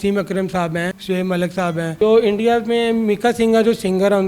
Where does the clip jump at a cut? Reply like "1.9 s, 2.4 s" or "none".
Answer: 1.9 s

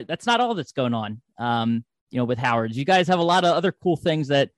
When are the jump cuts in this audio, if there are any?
none

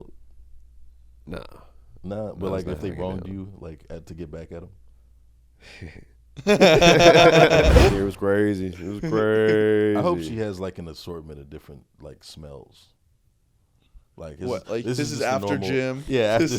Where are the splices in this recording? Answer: 7.9 s

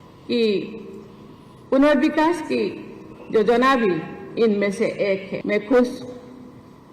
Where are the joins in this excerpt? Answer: 5.3 s

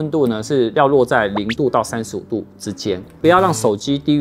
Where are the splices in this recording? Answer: 3.1 s

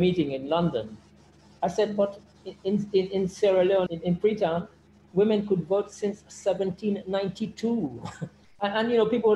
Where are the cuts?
3.9 s, 8.4 s

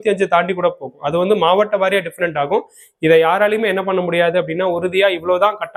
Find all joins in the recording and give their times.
none

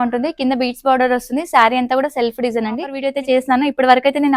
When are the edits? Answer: 3.0 s

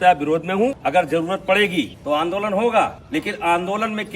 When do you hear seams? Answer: 0.8 s, 2.0 s, 3.0 s

